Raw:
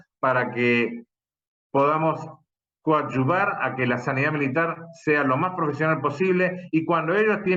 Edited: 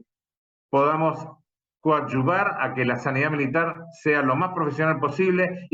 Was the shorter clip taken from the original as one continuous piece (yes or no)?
yes